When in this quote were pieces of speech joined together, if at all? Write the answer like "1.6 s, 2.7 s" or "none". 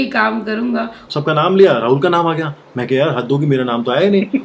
1.0 s